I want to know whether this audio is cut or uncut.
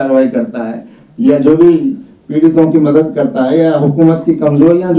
uncut